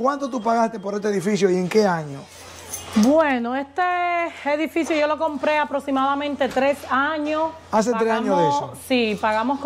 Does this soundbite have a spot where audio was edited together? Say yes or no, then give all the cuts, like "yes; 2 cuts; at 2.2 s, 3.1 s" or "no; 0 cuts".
no; 0 cuts